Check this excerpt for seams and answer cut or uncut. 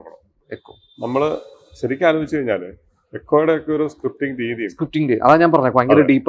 uncut